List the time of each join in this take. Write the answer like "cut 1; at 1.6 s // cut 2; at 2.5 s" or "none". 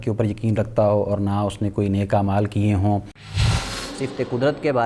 cut 1; at 3.4 s